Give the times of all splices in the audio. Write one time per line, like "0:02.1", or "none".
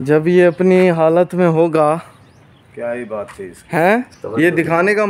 0:04.1